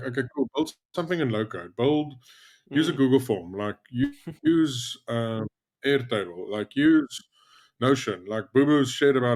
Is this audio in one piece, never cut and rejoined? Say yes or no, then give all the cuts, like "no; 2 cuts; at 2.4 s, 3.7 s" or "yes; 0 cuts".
yes; 0 cuts